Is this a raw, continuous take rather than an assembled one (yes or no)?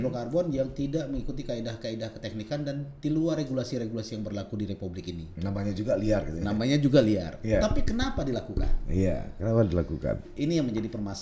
yes